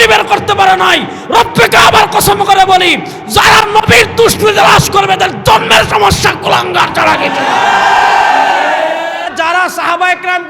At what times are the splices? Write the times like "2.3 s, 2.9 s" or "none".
9.3 s